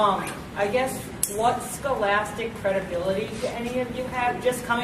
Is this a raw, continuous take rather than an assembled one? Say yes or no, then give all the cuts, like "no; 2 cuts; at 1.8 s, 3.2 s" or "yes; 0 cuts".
yes; 0 cuts